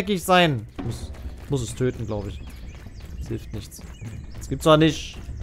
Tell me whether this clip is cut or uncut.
cut